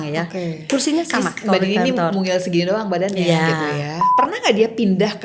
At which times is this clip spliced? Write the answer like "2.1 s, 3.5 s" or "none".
4.0 s